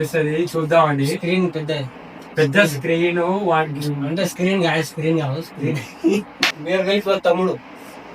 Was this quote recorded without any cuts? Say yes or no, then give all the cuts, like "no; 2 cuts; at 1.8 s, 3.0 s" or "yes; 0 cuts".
no; 1 cut; at 6.5 s